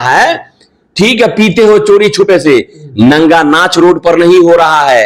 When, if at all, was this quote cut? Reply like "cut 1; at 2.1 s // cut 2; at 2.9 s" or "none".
none